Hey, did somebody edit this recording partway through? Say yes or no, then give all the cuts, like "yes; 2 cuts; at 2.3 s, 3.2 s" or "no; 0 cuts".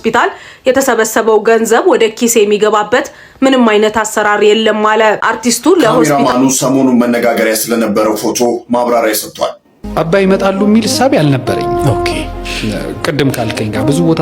yes; 1 cut; at 6.0 s